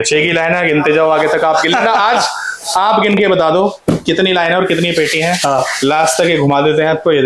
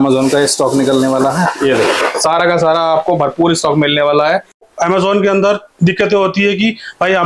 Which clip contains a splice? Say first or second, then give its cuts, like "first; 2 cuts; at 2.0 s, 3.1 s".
second; 1 cut; at 4.7 s